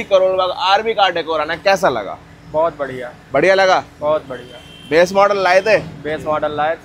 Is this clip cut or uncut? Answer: uncut